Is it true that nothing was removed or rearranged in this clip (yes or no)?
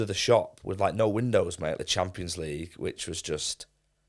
no